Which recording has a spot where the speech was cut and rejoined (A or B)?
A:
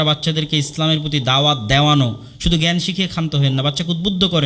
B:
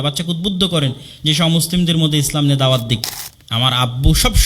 B